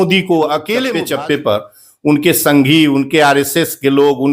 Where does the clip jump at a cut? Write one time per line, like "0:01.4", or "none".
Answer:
0:00.9

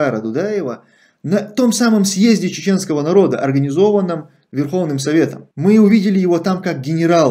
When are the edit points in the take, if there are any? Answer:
none

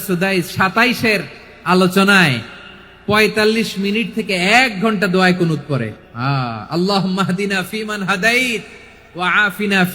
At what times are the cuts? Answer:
0:05.9

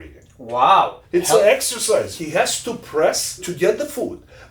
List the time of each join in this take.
0:01.0
0:02.2
0:03.5

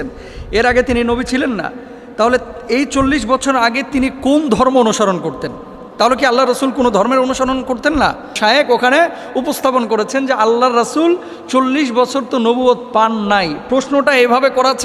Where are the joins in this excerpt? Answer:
0:08.4

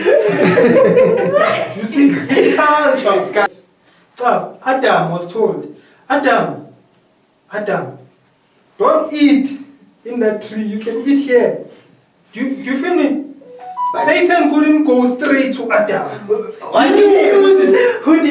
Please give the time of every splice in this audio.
0:03.5

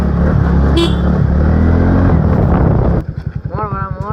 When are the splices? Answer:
0:03.0

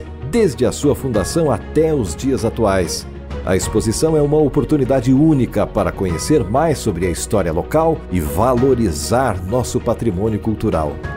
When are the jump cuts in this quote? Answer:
none

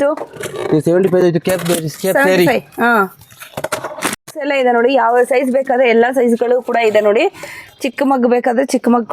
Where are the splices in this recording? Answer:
0:04.2

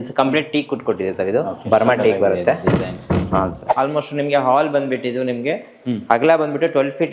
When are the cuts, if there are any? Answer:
0:03.6

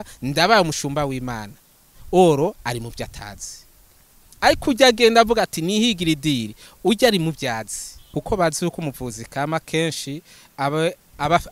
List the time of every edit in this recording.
0:08.1

